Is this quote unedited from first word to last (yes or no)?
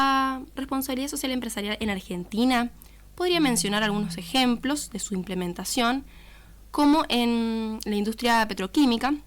yes